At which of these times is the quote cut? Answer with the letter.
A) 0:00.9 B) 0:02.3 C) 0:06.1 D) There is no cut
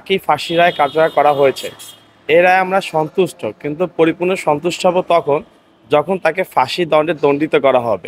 D